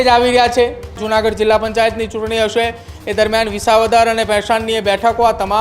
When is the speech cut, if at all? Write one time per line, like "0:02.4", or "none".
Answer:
0:01.0